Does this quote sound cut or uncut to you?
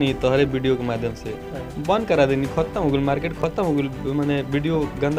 uncut